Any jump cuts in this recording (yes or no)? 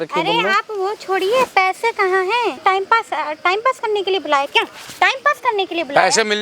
yes